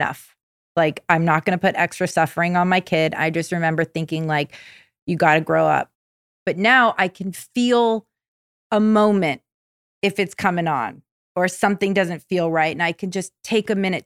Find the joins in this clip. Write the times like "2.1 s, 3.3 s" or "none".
6.4 s